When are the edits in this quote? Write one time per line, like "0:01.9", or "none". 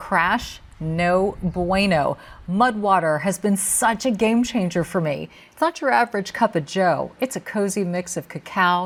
none